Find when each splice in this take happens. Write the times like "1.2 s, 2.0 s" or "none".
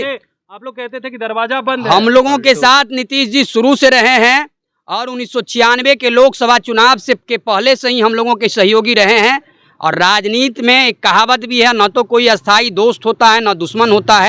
none